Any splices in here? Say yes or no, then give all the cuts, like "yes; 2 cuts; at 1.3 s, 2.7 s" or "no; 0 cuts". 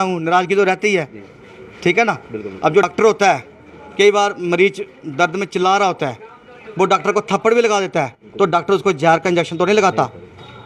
yes; 1 cut; at 2.9 s